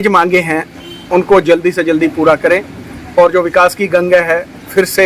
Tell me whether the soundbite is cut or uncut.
uncut